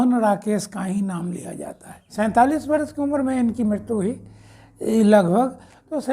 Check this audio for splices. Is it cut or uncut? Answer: cut